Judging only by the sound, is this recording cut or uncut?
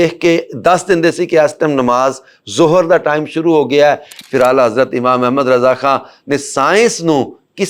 uncut